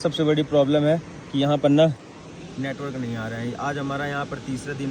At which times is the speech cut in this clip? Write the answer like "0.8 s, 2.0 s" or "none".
none